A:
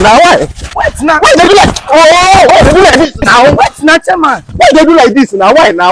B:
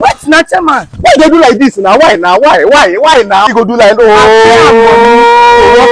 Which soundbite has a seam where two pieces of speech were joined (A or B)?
B